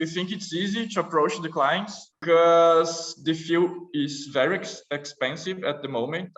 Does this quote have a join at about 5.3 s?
no; 1 cut; at 2.2 s

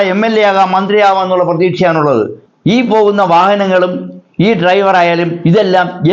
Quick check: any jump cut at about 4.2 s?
no; 1 cut; at 2.4 s

